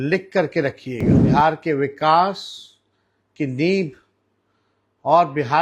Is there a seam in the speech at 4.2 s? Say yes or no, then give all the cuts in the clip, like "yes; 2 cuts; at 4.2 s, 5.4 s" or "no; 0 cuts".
no; 1 cut; at 1.1 s